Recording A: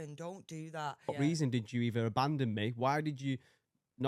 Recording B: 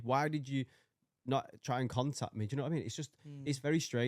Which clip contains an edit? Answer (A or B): A